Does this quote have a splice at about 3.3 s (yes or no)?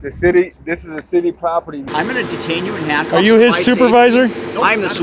no